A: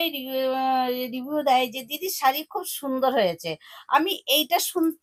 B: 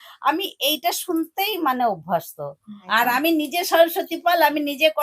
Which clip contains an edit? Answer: B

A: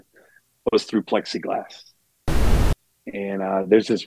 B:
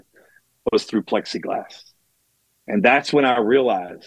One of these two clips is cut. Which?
A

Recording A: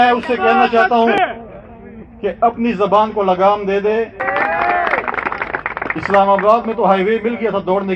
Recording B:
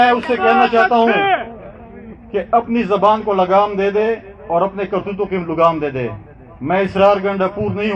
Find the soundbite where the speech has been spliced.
A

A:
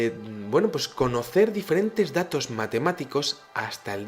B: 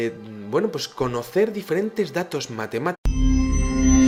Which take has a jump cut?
A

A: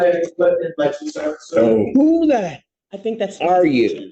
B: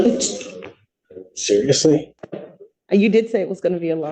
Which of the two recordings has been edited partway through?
B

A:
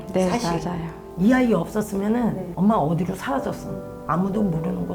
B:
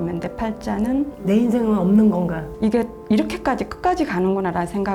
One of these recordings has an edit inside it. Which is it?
B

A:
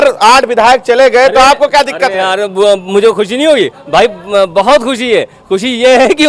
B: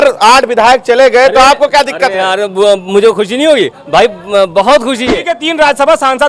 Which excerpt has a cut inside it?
B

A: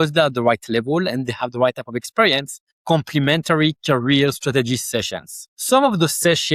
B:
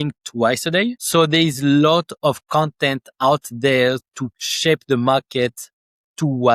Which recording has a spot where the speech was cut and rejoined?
B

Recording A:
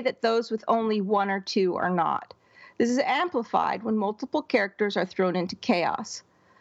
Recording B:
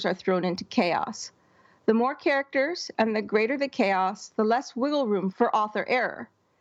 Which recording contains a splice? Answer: B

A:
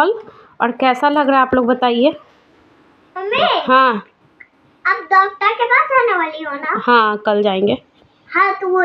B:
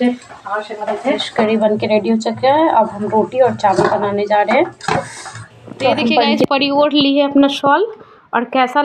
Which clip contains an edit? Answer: B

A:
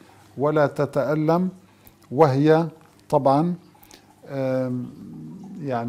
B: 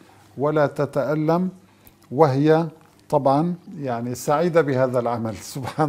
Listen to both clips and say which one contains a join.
B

